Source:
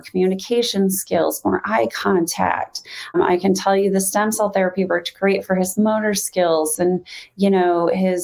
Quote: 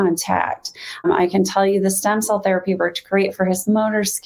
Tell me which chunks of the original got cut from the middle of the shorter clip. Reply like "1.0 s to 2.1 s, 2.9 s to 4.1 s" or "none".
none